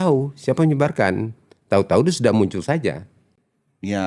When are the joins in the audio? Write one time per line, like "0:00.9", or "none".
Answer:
none